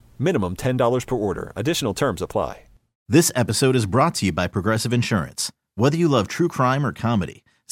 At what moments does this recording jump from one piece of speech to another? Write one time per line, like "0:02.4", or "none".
0:02.9